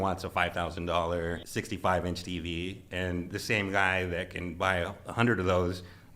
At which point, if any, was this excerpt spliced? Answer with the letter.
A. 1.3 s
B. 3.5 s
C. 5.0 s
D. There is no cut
A